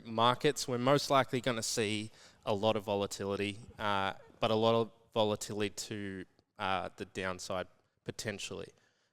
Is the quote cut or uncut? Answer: uncut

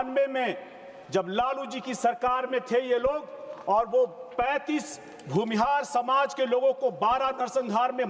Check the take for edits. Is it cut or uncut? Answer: uncut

